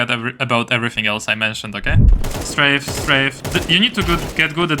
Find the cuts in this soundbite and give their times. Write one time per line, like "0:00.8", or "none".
0:02.1
0:03.4

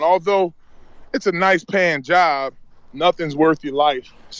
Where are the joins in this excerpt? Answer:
none

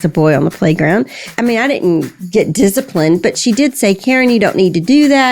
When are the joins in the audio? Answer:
0:01.3

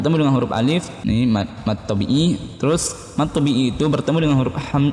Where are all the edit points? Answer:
0:00.9

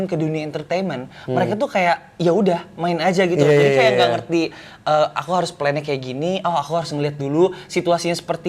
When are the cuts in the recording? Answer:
none

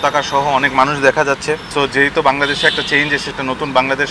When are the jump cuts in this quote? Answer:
0:01.6
0:03.3

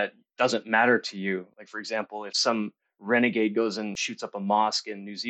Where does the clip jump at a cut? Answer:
0:02.4
0:04.0

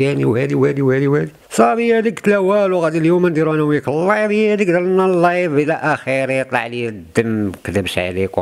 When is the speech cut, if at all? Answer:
0:01.4

